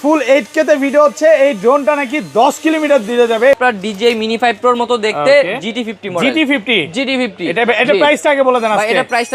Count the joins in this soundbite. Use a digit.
1